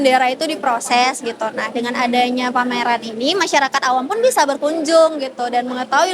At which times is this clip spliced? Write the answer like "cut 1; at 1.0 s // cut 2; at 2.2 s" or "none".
none